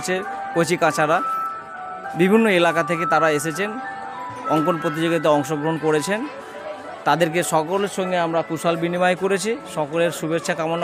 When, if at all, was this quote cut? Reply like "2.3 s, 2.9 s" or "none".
none